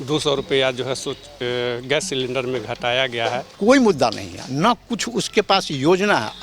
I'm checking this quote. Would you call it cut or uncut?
cut